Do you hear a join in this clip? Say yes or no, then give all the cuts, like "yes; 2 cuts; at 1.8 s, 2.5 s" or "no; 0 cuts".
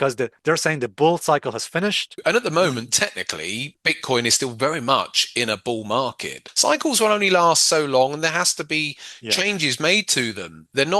yes; 3 cuts; at 2.2 s, 3.7 s, 6.4 s